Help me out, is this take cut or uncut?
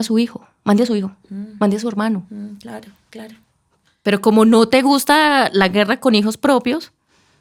uncut